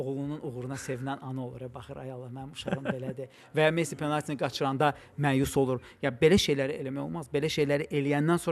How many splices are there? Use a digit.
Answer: 0